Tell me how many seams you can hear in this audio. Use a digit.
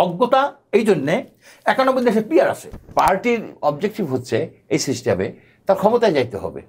1